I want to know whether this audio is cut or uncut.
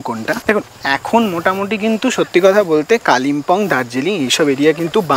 uncut